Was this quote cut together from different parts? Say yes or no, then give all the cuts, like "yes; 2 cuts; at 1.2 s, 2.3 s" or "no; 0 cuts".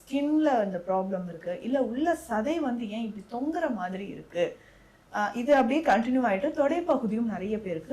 no; 0 cuts